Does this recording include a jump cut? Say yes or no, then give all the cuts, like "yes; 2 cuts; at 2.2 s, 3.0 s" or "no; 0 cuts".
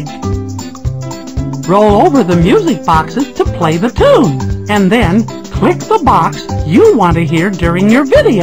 yes; 1 cut; at 7.1 s